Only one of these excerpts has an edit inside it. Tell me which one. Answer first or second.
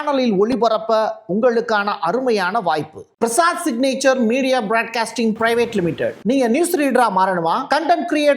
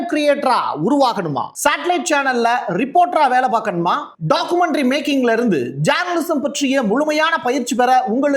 first